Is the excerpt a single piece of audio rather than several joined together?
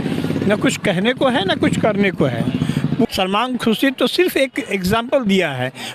no; 1 cut; at 3.1 s

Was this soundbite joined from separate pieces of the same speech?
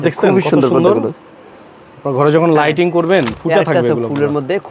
no; 0 cuts

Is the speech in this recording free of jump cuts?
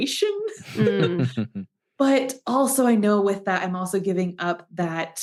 yes; 0 cuts

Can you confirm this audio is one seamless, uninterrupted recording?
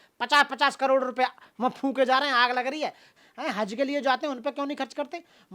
no; 1 cut; at 3.1 s

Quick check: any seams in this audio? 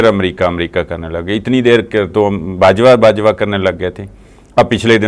no; 0 cuts

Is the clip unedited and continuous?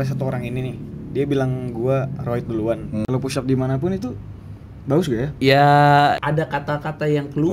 no; 2 cuts; at 3.0 s, 6.2 s

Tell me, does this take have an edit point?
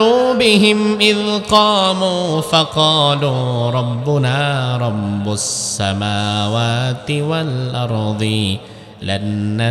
no; 0 cuts

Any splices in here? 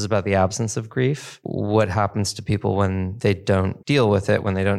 yes; 2 cuts; at 1.3 s, 3.5 s

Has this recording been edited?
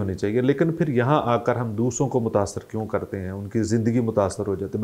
no; 0 cuts

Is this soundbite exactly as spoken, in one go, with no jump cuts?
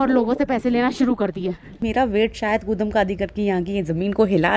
no; 1 cut; at 1.8 s

